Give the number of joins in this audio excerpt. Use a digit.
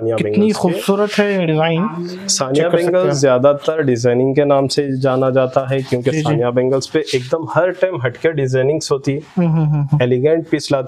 0